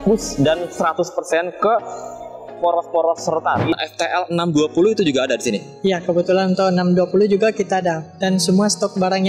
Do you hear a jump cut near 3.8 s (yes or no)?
yes